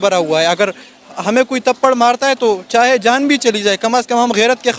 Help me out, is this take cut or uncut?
uncut